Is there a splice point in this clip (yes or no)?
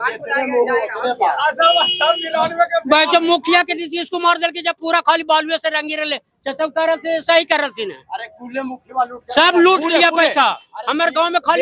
no